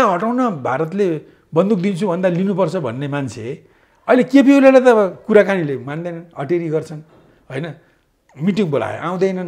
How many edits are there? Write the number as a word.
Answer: zero